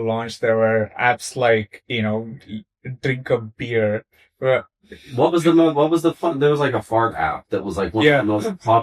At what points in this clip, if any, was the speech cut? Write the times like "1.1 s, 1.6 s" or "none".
none